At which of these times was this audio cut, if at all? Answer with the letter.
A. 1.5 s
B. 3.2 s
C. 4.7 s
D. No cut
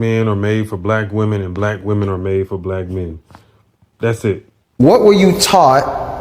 C